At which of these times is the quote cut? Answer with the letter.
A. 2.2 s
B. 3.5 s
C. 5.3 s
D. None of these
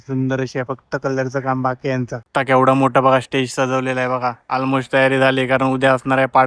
A